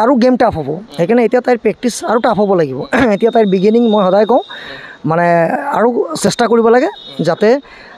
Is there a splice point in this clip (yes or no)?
no